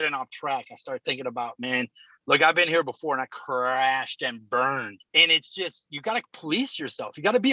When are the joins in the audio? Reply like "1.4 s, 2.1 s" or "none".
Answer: none